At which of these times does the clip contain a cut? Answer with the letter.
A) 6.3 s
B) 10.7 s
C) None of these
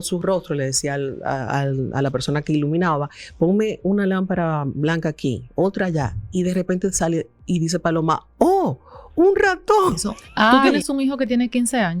B